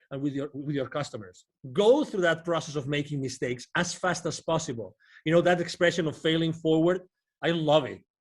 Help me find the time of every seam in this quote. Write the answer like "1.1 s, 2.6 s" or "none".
1.6 s